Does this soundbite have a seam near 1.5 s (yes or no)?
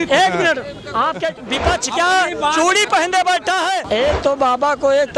yes